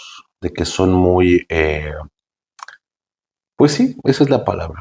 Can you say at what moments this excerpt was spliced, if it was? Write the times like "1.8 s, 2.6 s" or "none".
none